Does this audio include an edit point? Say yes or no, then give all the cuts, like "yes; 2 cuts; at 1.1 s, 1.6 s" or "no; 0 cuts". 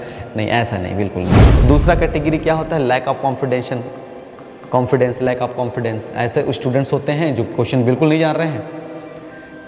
yes; 1 cut; at 1.4 s